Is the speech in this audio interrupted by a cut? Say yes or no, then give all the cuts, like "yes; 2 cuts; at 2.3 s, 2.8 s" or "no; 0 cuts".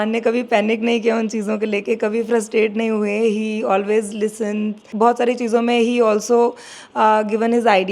yes; 1 cut; at 4.9 s